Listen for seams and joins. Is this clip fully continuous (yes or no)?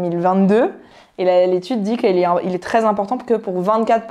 yes